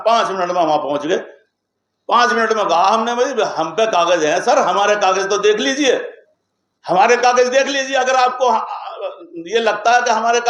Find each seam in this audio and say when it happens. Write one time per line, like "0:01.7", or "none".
none